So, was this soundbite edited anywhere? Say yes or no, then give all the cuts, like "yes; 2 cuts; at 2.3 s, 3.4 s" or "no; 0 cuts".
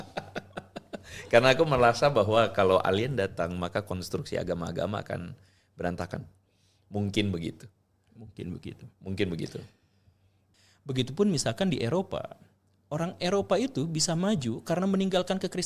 yes; 1 cut; at 10.3 s